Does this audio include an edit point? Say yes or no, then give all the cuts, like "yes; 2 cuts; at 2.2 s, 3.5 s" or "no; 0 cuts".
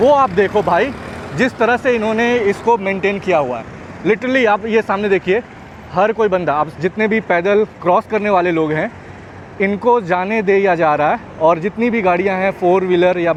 no; 0 cuts